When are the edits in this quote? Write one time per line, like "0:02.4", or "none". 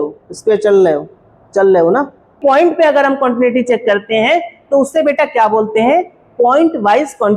0:02.4